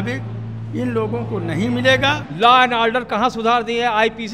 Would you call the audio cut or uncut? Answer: cut